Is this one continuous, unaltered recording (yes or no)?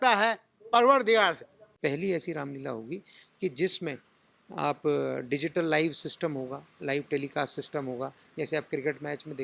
no